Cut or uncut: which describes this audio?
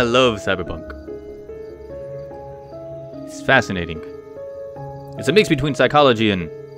uncut